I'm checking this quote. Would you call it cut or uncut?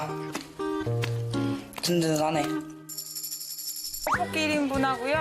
cut